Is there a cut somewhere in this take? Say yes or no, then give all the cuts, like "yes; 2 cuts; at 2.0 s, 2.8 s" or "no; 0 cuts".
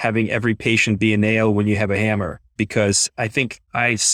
yes; 1 cut; at 2.4 s